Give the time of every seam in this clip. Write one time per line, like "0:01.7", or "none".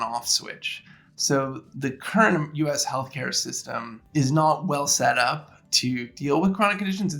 0:01.7
0:04.0